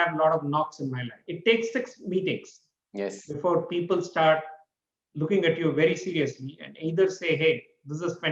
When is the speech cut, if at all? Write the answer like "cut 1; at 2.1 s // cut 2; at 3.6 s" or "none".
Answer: cut 1; at 1.2 s